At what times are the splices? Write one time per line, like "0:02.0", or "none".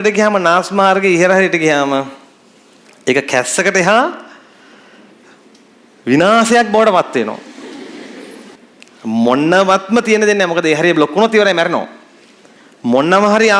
0:08.6